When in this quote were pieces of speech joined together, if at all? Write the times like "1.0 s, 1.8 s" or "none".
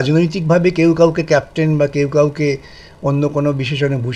none